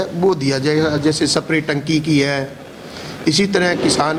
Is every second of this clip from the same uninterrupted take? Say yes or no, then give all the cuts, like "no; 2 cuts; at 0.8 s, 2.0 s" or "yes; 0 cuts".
yes; 0 cuts